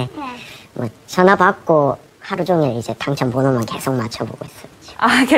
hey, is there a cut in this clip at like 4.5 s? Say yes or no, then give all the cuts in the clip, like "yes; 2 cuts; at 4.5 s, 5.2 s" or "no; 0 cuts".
no; 0 cuts